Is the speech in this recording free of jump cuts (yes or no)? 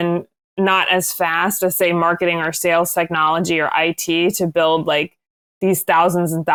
yes